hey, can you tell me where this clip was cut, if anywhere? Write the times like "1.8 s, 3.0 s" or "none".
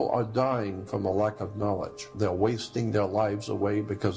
2.1 s